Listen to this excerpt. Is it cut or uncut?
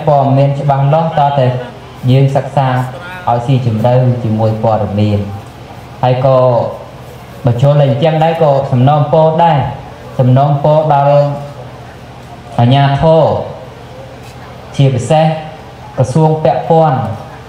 uncut